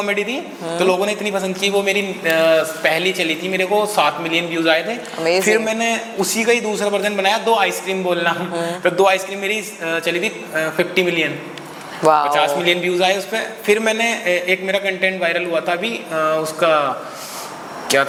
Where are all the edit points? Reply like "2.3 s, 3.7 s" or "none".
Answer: none